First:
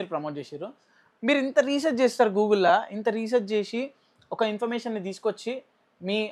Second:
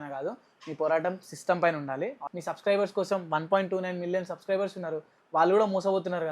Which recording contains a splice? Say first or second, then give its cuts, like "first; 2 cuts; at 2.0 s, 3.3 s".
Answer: second; 1 cut; at 2.3 s